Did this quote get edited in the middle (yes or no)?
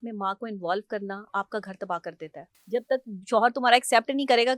yes